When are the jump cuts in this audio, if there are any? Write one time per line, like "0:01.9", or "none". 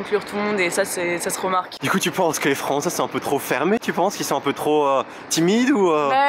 none